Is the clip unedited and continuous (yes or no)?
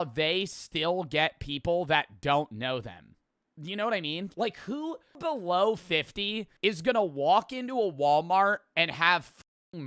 no